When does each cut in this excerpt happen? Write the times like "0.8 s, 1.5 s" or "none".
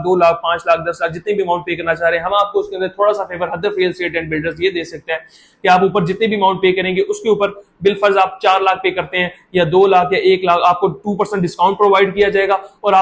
none